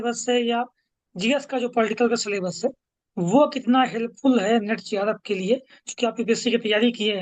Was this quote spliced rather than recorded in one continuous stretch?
no; 0 cuts

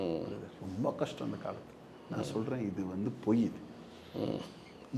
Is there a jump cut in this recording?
no; 0 cuts

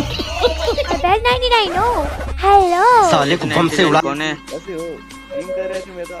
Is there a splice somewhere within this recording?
yes; 2 cuts; at 1.0 s, 5.3 s

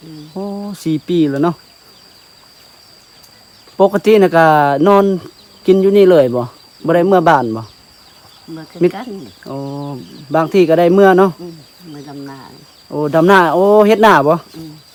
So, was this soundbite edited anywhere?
no; 0 cuts

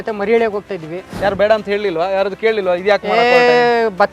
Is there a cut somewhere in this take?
yes; 1 cut; at 1.0 s

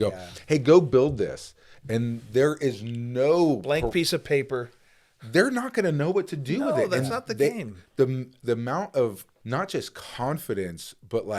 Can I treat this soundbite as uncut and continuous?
no; 1 cut; at 9.3 s

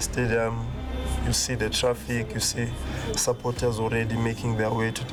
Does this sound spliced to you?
no; 0 cuts

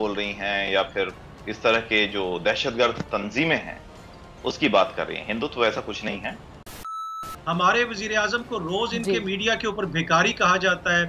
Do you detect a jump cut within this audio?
yes; 1 cut; at 6.9 s

